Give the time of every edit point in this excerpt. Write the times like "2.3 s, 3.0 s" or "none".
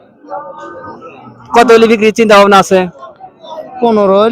none